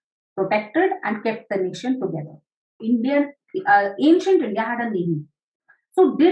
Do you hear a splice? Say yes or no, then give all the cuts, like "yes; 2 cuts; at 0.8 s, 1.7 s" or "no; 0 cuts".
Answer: yes; 1 cut; at 2.8 s